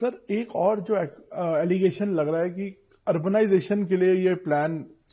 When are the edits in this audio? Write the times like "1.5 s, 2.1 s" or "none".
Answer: none